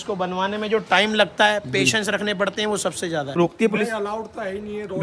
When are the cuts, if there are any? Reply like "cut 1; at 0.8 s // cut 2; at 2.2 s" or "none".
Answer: cut 1; at 3.4 s